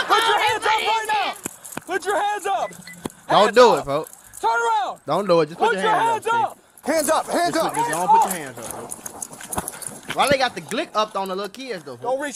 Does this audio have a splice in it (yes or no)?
no